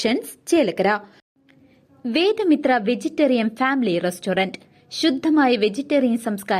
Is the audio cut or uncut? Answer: cut